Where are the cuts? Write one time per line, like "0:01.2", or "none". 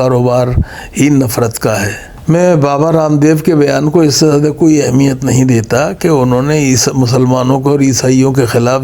0:02.1